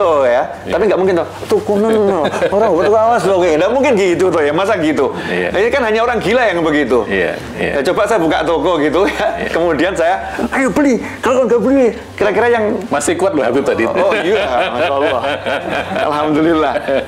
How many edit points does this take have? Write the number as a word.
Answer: zero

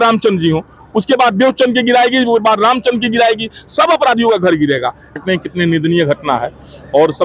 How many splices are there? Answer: one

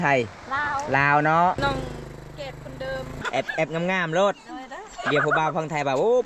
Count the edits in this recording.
two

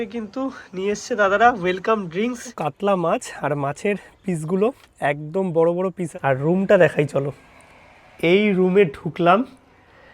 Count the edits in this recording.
two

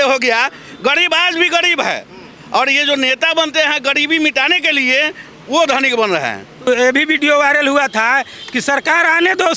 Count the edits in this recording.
one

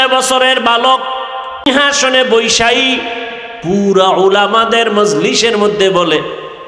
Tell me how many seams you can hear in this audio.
one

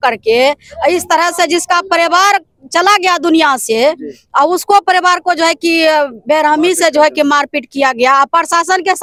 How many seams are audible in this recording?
zero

